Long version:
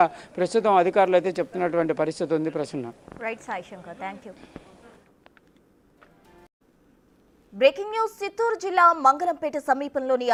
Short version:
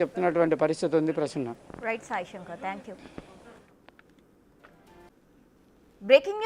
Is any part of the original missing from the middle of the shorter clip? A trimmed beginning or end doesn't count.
yes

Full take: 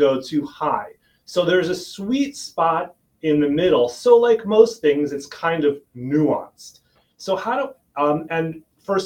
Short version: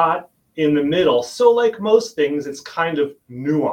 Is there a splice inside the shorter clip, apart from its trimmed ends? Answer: no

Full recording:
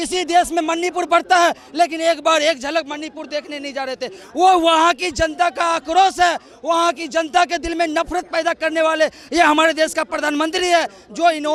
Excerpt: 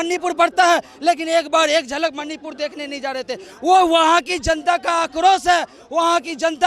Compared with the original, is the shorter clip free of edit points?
yes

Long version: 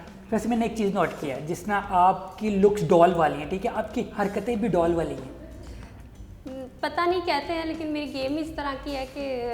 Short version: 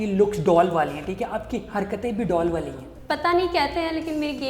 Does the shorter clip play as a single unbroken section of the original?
no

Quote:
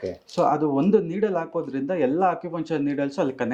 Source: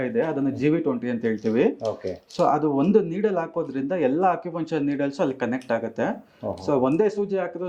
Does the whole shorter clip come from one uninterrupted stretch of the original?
yes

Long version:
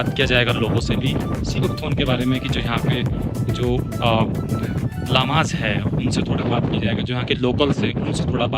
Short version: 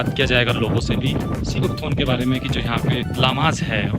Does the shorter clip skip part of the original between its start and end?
yes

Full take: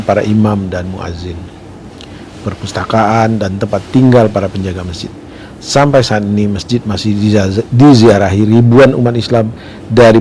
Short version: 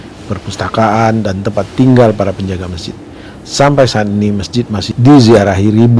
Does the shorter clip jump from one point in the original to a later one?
yes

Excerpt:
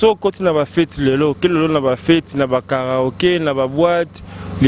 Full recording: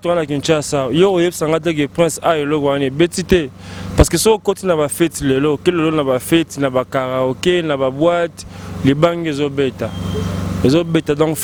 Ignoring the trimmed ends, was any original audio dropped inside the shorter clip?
no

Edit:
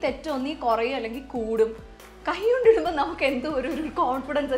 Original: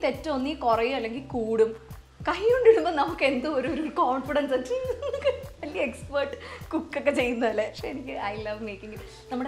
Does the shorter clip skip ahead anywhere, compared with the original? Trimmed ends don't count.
no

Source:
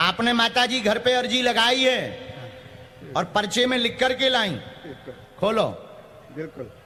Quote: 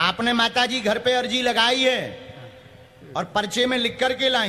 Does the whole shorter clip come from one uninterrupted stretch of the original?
yes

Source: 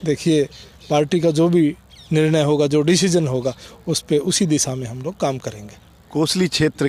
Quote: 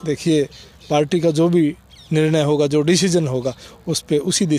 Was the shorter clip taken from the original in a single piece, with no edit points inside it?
yes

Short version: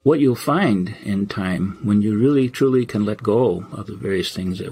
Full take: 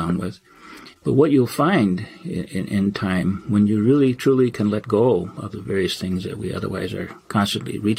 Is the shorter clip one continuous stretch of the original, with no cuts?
no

